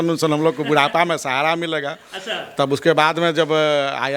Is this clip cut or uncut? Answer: uncut